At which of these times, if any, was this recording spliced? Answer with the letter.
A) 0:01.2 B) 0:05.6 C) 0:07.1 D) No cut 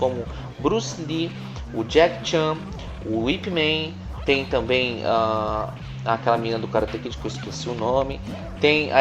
A